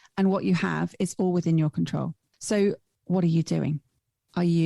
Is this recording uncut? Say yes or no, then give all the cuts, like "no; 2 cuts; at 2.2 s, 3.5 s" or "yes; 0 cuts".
no; 2 cuts; at 2.3 s, 2.9 s